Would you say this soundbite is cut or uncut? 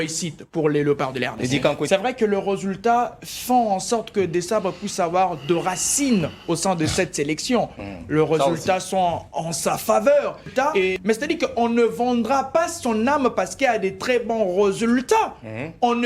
cut